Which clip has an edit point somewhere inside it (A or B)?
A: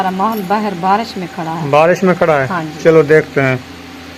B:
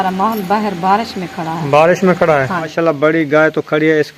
B